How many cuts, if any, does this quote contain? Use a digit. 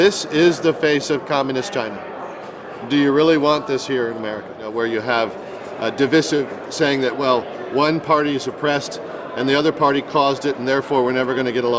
1